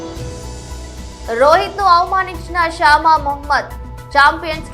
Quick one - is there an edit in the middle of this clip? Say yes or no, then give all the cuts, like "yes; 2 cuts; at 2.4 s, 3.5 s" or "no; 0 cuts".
yes; 1 cut; at 1.0 s